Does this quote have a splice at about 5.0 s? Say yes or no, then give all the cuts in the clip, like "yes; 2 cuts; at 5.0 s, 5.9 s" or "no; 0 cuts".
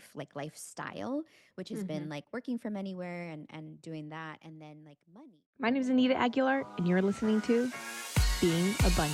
yes; 1 cut; at 5.0 s